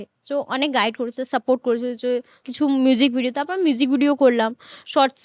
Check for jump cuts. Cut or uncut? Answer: cut